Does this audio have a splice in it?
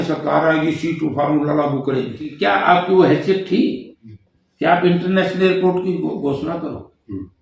yes; 1 cut; at 2.3 s

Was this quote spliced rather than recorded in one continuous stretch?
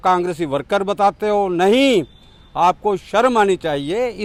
no; 0 cuts

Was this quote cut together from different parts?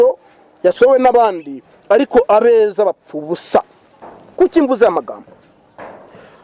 no; 0 cuts

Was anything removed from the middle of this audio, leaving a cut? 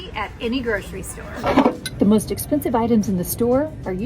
yes; 1 cut; at 1.2 s

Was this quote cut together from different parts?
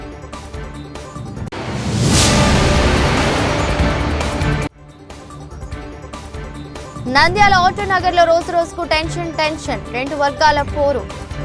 yes; 3 cuts; at 1.5 s, 6.2 s, 7.0 s

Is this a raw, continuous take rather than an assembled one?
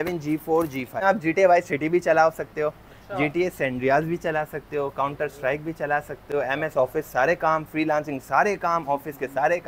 no; 1 cut; at 1.0 s

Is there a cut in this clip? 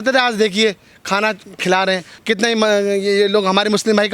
no; 0 cuts

